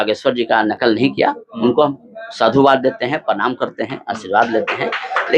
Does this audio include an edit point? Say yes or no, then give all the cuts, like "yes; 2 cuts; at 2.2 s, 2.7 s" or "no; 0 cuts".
no; 0 cuts